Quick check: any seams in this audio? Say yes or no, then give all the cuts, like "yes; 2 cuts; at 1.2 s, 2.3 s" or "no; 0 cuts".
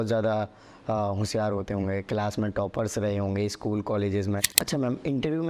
yes; 1 cut; at 4.6 s